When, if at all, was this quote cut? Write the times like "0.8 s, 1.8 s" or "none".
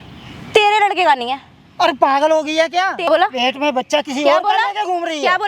3.0 s

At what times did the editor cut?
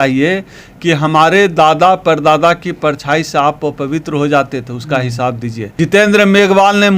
5.6 s

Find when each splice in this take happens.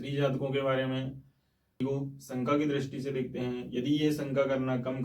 1.6 s

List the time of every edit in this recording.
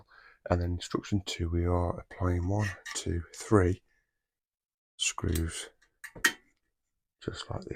none

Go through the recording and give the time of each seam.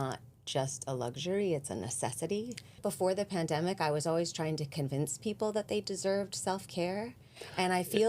2.8 s

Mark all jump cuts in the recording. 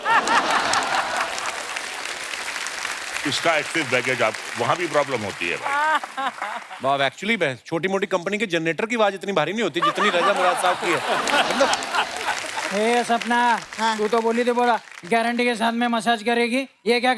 12.5 s

